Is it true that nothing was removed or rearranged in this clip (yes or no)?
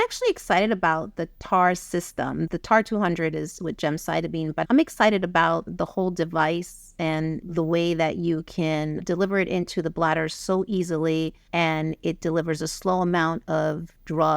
no